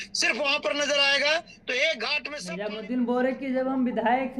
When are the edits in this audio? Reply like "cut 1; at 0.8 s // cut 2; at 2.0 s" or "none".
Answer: cut 1; at 2.3 s